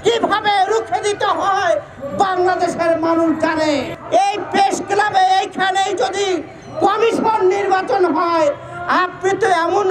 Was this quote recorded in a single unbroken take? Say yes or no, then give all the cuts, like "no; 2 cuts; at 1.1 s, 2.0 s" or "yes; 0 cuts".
no; 1 cut; at 3.9 s